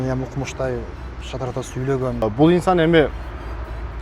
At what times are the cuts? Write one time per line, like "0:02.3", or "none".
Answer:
0:02.2